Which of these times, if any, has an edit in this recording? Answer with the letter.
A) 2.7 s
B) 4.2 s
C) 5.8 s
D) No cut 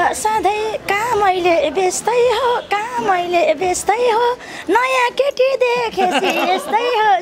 D